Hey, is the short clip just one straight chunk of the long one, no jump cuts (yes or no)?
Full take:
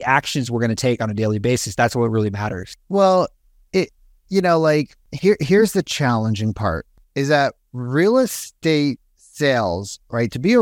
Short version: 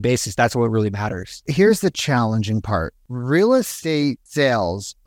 no